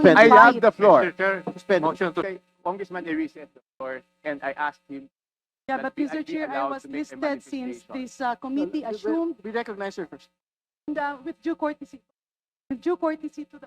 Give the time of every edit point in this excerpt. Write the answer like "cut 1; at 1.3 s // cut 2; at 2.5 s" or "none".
cut 1; at 2.3 s

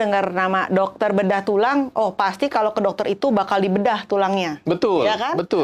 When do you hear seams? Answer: none

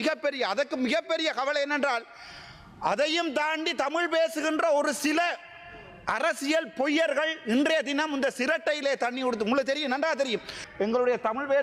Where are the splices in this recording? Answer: cut 1; at 10.6 s

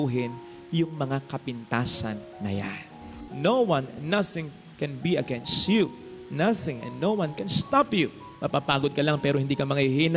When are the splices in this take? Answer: cut 1; at 3.2 s

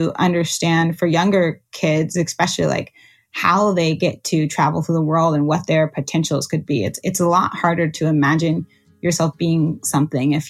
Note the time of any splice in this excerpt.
none

